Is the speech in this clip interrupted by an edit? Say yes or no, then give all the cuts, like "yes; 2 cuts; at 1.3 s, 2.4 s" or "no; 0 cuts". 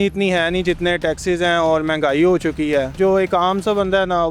yes; 1 cut; at 3.0 s